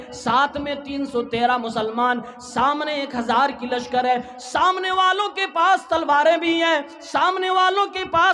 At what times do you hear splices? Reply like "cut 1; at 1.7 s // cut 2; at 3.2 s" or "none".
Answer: none